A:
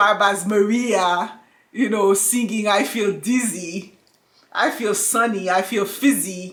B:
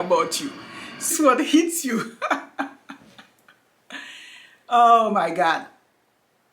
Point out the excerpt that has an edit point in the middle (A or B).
B